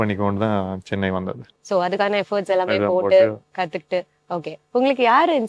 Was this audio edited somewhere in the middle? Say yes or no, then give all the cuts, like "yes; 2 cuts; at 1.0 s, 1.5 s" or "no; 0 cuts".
no; 0 cuts